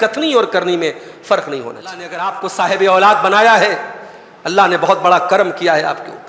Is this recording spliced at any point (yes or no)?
yes